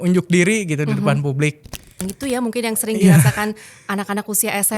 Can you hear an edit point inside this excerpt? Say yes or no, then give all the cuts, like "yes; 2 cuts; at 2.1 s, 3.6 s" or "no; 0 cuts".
yes; 1 cut; at 2.1 s